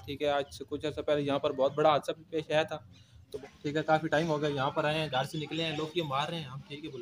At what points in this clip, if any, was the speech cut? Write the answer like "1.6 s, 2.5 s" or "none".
3.2 s